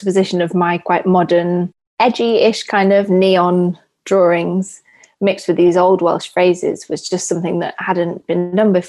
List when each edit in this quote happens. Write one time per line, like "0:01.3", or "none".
none